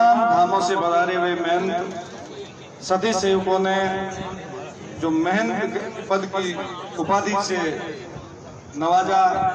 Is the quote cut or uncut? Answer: uncut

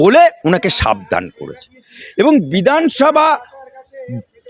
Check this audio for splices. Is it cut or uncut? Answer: cut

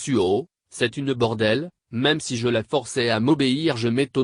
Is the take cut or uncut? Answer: uncut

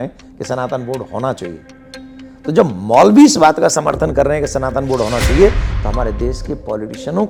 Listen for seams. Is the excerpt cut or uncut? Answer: uncut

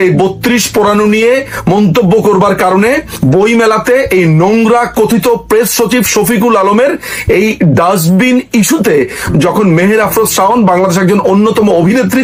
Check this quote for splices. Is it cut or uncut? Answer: uncut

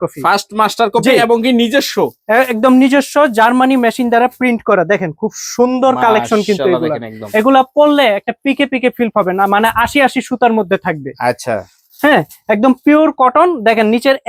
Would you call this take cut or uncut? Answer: uncut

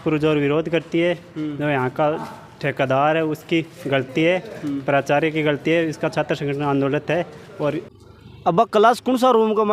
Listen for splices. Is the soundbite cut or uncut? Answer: cut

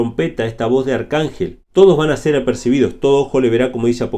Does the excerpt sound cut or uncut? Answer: cut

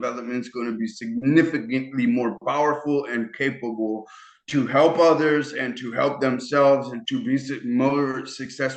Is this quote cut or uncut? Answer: cut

